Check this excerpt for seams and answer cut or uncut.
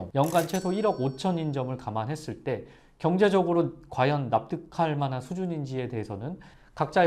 uncut